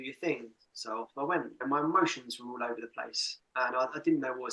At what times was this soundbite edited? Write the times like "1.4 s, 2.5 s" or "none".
1.6 s